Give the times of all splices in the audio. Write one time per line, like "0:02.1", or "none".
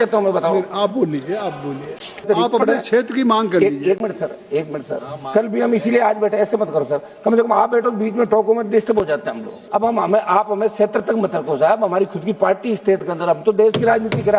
0:02.2
0:09.6